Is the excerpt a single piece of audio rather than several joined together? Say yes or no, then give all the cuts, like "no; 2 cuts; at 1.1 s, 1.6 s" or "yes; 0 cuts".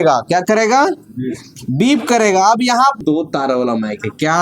no; 1 cut; at 3.0 s